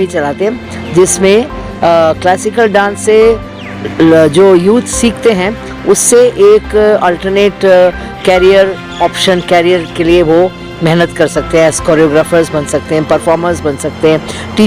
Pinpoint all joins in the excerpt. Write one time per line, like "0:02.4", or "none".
none